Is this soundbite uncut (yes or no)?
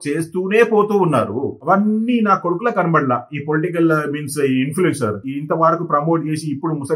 no